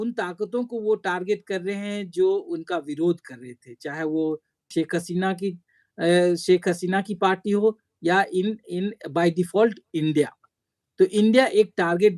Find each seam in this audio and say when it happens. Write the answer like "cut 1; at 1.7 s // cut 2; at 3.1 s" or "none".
none

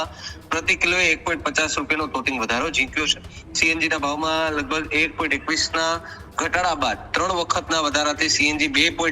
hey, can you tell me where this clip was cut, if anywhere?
none

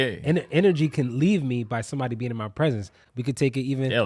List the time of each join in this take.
none

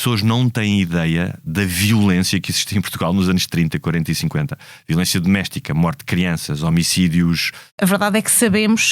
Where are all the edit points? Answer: cut 1; at 7.8 s

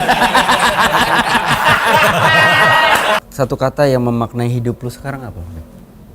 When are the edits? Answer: cut 1; at 3.2 s

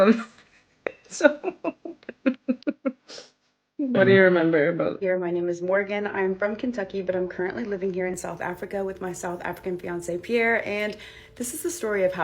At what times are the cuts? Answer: cut 1; at 5.0 s

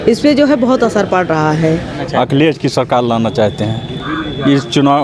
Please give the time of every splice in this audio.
cut 1; at 2.0 s // cut 2; at 4.0 s

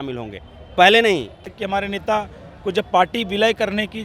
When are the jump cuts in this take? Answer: cut 1; at 1.5 s

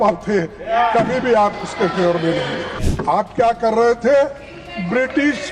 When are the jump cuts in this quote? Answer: cut 1; at 2.8 s

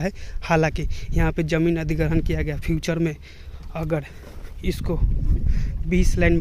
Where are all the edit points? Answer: none

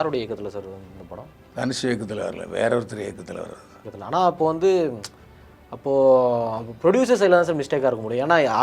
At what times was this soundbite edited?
cut 1; at 3.9 s

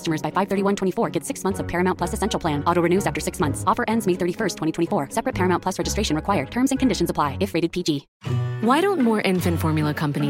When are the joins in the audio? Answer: cut 1; at 8.2 s

